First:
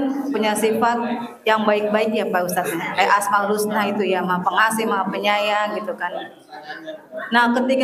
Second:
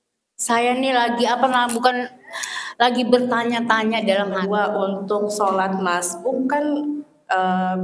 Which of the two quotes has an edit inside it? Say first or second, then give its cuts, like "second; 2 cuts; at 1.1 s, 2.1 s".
second; 1 cut; at 4.4 s